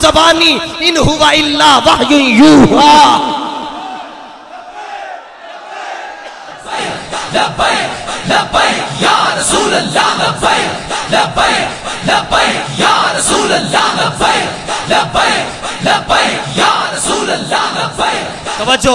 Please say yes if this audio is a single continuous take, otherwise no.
yes